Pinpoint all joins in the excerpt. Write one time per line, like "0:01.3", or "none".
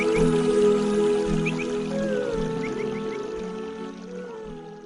none